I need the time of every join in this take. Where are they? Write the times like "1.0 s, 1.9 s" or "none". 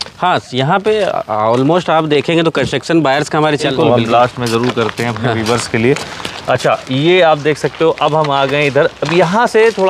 3.6 s